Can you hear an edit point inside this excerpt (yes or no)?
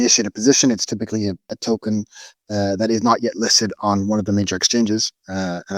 yes